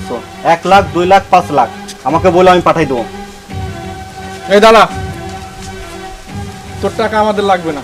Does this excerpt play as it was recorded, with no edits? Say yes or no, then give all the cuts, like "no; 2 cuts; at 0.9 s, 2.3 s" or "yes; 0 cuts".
yes; 0 cuts